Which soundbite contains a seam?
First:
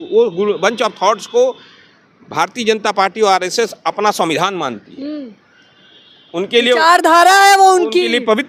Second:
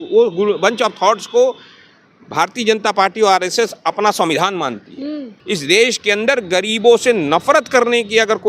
second; 1 cut; at 5.3 s

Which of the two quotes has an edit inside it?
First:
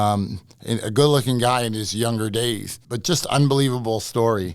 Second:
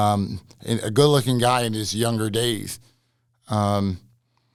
first; 1 cut; at 2.8 s

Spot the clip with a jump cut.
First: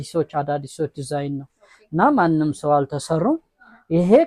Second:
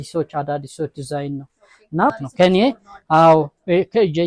second; 1 cut; at 2.1 s

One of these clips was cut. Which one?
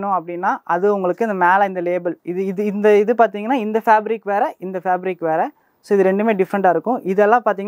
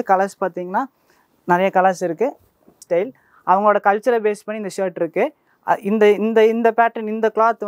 second; 1 cut; at 2.8 s

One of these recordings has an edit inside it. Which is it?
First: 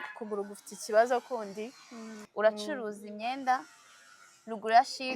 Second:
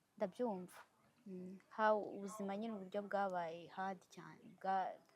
first; 1 cut; at 2.3 s

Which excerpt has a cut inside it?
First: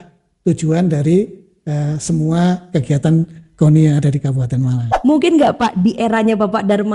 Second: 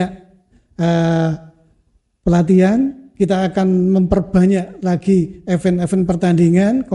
first; 1 cut; at 4.8 s

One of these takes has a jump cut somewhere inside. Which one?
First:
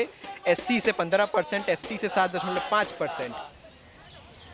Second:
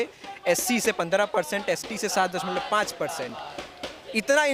first; 1 cut; at 3.4 s

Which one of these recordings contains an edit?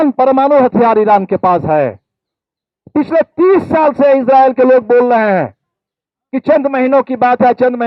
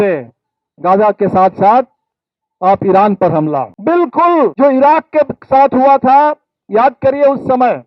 second; 2 cuts; at 3.7 s, 4.5 s

